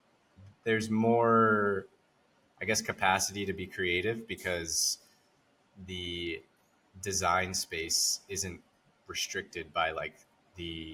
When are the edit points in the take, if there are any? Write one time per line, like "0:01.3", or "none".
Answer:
none

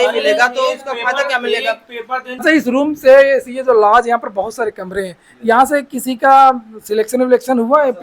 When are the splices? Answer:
0:02.4

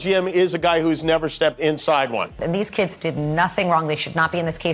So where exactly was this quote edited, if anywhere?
0:02.4

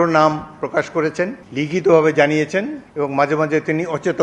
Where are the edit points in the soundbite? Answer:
0:01.4
0:02.8

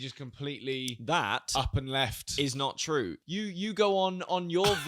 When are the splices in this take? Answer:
0:03.2

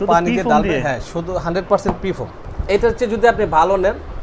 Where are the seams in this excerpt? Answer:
0:02.5

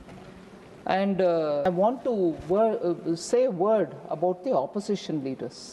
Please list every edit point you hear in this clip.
0:01.7

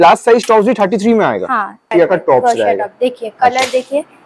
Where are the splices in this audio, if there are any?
0:01.9

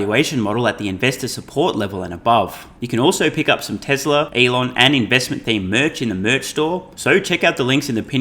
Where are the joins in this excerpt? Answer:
0:02.7
0:04.3
0:06.9

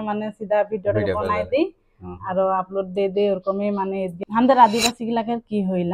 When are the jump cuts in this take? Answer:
0:04.1

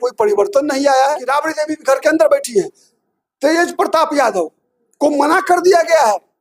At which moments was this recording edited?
0:01.2

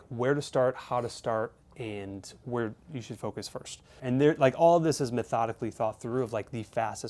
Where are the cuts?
0:03.9

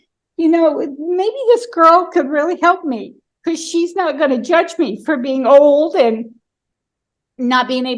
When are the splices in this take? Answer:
none

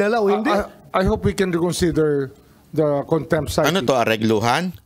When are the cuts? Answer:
0:03.6

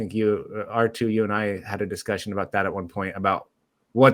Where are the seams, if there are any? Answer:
none

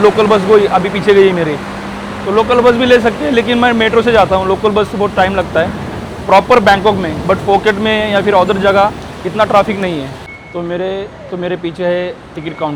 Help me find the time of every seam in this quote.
none

